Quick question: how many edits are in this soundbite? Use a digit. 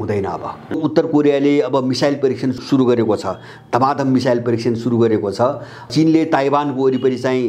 3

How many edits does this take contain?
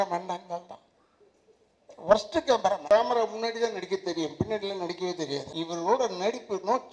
2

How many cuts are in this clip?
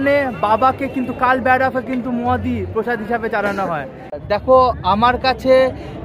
1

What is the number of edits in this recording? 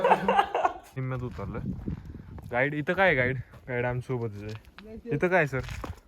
1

